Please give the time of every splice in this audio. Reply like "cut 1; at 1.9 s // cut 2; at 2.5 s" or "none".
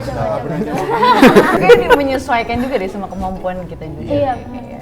cut 1; at 1.6 s